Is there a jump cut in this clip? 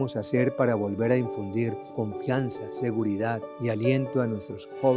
yes; 2 cuts; at 1.8 s, 3.5 s

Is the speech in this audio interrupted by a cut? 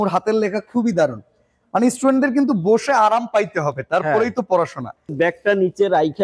yes; 1 cut; at 5.1 s

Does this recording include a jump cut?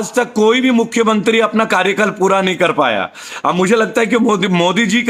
no; 0 cuts

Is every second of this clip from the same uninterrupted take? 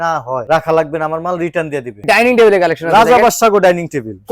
no; 1 cut; at 2.0 s

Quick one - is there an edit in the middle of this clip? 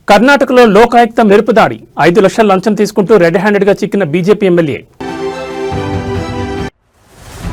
no; 0 cuts

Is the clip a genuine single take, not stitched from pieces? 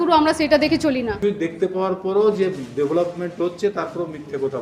no; 1 cut; at 1.2 s

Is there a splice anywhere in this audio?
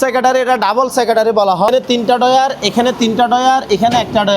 yes; 1 cut; at 1.7 s

